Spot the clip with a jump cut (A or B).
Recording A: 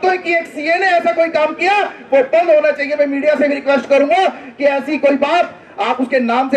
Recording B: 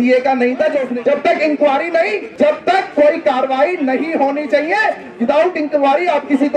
B